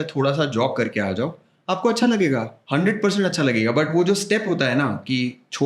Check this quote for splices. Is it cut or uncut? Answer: cut